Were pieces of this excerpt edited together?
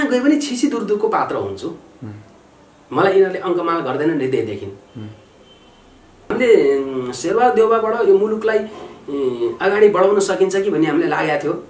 yes; 1 cut; at 6.2 s

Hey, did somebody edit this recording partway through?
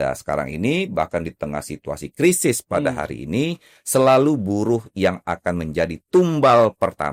no; 0 cuts

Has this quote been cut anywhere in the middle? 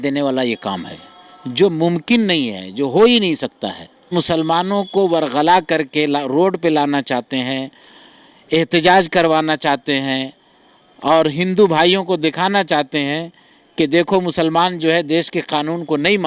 yes; 1 cut; at 4.1 s

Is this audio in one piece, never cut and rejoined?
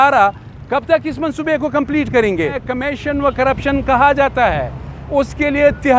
no; 1 cut; at 2.6 s

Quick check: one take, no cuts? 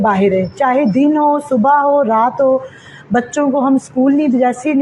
yes; 0 cuts

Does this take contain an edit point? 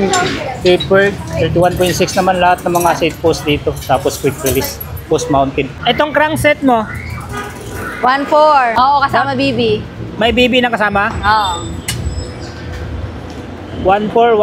yes; 2 cuts; at 6.0 s, 8.7 s

